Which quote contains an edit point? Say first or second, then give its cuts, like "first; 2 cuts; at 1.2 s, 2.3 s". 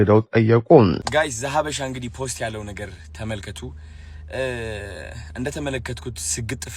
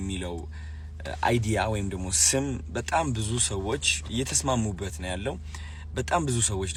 first; 1 cut; at 1.0 s